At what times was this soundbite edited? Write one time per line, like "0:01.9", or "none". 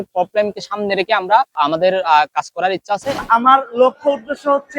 0:01.5
0:03.2